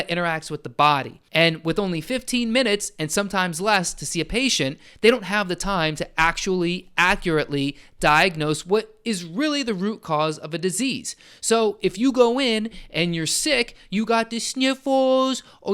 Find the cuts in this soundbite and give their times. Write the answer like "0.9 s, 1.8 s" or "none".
1.2 s